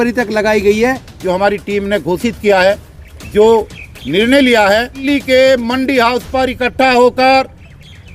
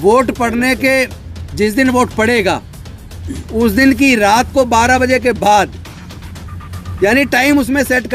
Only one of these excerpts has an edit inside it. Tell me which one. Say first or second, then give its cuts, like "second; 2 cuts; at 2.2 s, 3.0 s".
first; 2 cuts; at 1.1 s, 5.0 s